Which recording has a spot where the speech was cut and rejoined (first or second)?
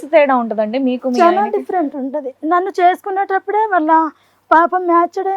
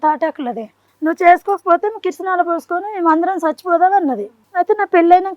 second